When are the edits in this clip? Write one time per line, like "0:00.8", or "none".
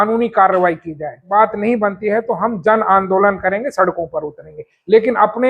0:01.2